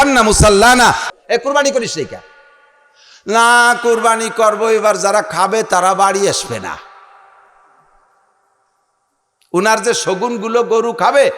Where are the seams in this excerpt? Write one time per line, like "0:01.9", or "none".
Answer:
0:01.1